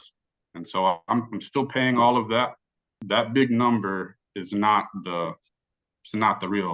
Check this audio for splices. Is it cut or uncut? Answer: cut